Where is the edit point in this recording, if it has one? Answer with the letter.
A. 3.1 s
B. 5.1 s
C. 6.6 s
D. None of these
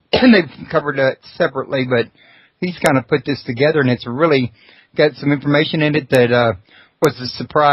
A